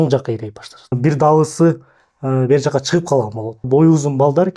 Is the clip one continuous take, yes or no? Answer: no